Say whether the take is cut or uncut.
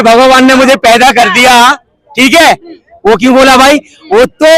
uncut